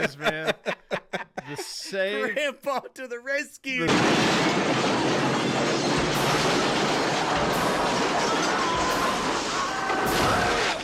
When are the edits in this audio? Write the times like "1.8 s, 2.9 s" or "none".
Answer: none